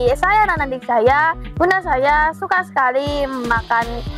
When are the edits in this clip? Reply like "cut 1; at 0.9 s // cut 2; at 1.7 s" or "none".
cut 1; at 1.5 s